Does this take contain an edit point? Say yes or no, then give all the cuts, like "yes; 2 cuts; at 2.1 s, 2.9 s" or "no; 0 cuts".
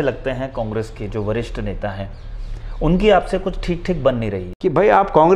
yes; 1 cut; at 4.4 s